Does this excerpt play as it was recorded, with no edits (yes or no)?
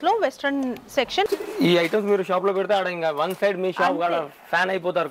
no